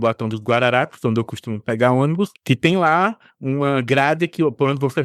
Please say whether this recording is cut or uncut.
cut